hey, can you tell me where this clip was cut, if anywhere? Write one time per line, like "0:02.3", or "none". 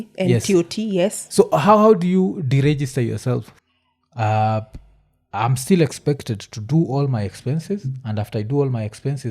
0:03.5